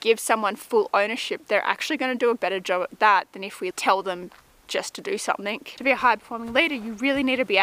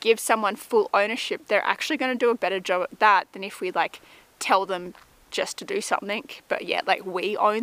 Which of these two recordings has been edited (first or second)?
first